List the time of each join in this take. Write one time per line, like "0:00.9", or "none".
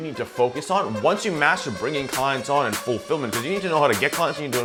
none